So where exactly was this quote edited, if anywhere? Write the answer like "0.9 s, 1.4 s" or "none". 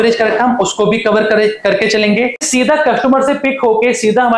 2.4 s